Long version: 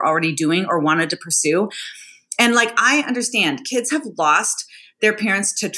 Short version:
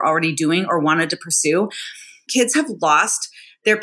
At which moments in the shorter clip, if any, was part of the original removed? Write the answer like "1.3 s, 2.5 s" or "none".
2.3 s